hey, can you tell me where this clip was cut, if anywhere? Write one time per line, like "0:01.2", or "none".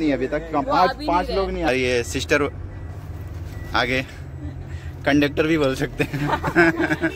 0:01.7